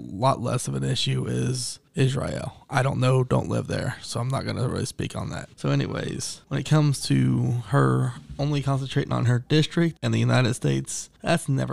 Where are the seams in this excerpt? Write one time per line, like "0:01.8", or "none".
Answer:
none